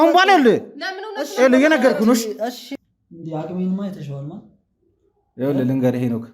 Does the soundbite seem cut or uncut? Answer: cut